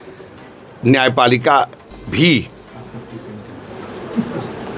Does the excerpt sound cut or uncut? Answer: uncut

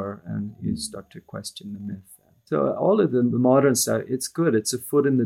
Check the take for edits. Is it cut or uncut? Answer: cut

